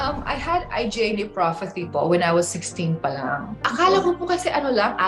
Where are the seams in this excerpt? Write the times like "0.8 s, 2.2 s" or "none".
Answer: 3.6 s

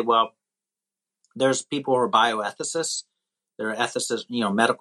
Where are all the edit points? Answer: none

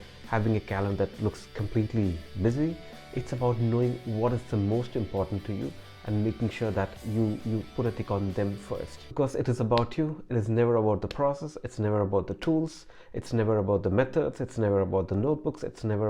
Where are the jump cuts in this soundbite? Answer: 9.0 s

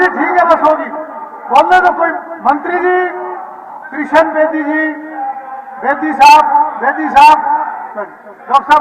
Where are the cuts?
none

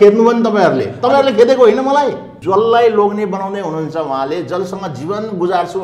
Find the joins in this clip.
2.3 s

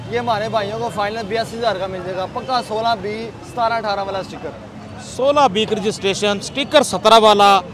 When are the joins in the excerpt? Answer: none

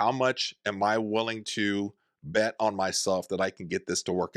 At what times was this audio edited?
none

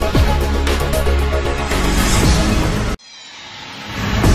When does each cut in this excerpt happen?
2.5 s

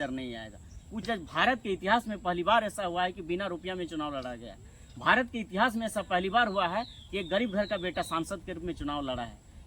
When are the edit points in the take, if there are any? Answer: 1.0 s

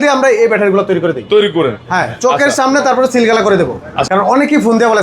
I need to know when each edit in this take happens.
3.9 s

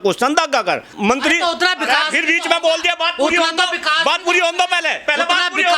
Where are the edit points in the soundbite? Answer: 1.0 s

